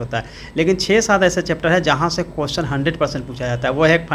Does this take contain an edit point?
no; 0 cuts

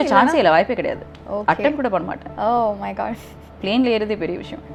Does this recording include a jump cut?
no; 0 cuts

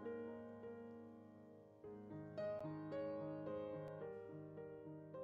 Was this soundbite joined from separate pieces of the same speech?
no; 0 cuts

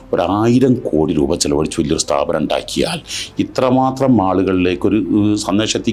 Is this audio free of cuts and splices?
yes; 0 cuts

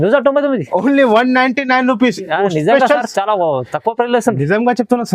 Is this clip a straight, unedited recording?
yes; 0 cuts

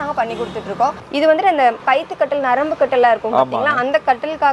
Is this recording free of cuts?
no; 1 cut; at 1.0 s

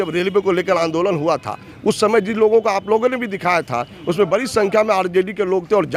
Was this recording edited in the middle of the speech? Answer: no; 0 cuts

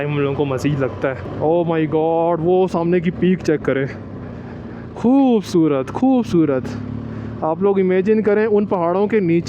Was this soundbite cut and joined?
yes; 1 cut; at 1.3 s

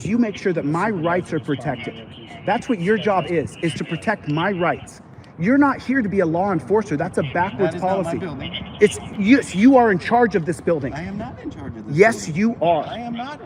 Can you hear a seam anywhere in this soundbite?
no; 0 cuts

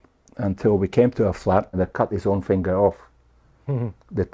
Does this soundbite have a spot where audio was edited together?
yes; 1 cut; at 1.7 s

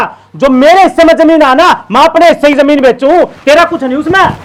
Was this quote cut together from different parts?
no; 0 cuts

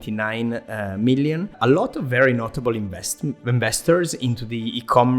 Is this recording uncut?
no; 1 cut; at 1.5 s

